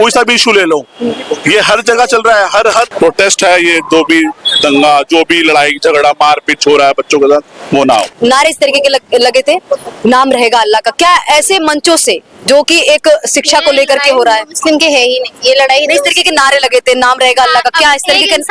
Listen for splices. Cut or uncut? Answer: cut